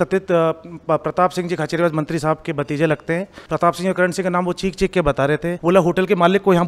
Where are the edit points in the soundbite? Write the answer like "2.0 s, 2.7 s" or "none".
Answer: 3.4 s, 5.6 s